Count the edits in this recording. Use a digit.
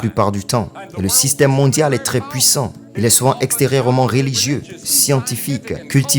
1